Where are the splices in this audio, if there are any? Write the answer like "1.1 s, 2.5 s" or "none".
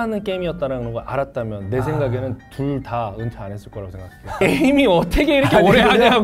4.4 s